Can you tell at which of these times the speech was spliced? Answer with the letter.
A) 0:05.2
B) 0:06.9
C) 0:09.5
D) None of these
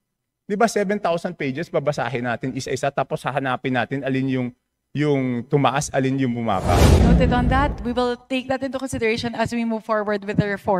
B